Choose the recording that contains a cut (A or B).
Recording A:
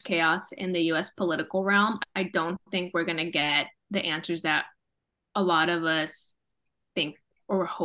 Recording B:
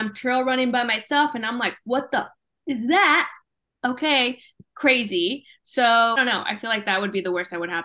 B